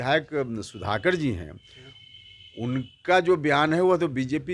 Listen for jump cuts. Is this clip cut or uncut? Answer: uncut